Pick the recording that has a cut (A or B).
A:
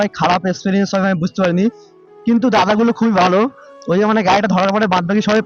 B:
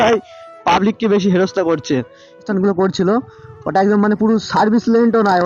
B